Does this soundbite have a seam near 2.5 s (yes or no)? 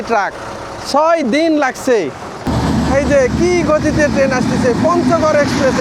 yes